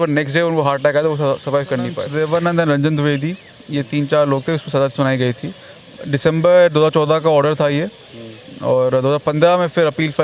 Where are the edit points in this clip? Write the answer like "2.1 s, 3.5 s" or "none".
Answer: 2.0 s

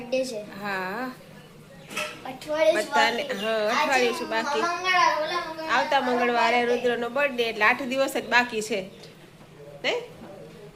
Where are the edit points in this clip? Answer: none

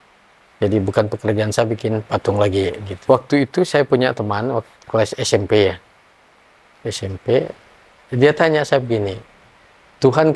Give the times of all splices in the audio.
2.9 s

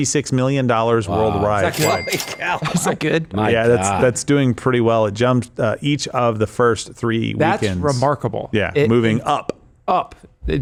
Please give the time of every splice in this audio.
none

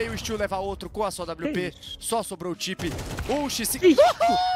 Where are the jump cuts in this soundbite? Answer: none

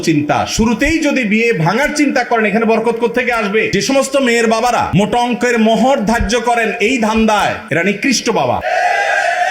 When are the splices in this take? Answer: 3.7 s, 4.9 s, 8.6 s

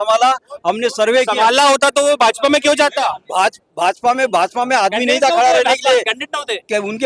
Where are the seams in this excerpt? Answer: none

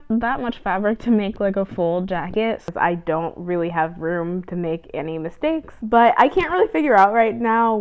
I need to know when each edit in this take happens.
2.7 s, 5.8 s

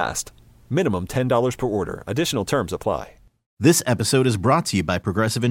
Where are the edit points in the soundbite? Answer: 3.4 s

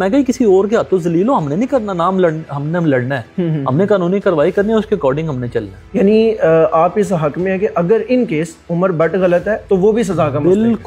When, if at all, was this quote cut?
none

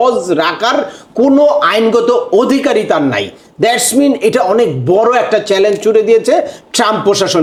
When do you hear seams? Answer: none

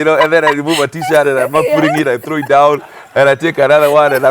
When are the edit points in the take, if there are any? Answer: none

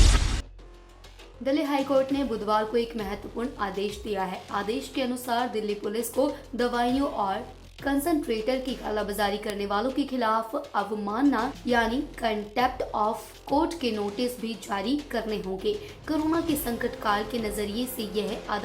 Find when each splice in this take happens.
1.0 s

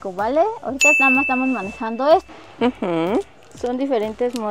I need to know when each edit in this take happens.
2.2 s

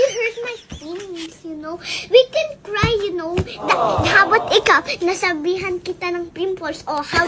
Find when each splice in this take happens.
none

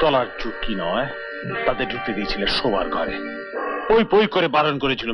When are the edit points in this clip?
none

